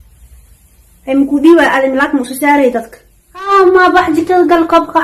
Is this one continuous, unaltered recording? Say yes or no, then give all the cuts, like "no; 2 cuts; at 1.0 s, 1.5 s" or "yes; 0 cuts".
no; 1 cut; at 3.5 s